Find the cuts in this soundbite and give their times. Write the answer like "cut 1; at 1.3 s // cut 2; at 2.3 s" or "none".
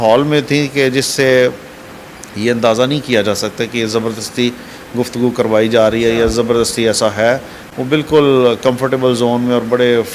none

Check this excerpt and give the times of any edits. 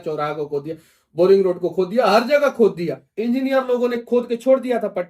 cut 1; at 3.0 s

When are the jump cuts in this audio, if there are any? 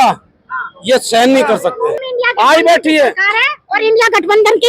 cut 1; at 2.0 s

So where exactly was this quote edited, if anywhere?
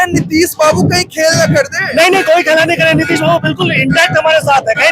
none

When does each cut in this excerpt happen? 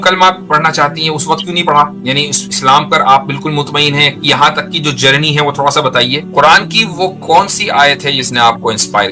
cut 1; at 2.0 s // cut 2; at 6.3 s

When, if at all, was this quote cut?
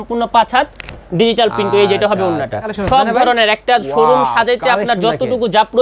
cut 1; at 2.7 s

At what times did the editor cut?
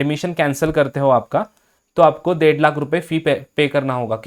none

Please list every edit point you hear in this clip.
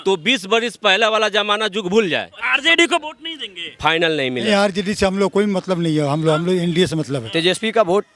cut 1; at 2.5 s // cut 2; at 4.5 s // cut 3; at 7.2 s

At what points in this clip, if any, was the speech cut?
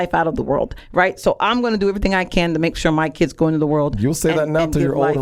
none

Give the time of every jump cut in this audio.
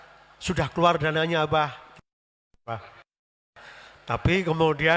none

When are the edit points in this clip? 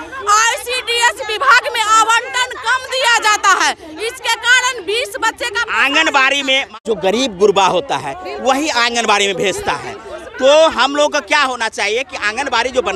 none

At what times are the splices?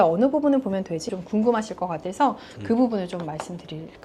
cut 1; at 1.0 s

